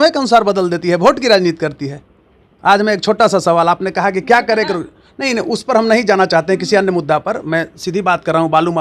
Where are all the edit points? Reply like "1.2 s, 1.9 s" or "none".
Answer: none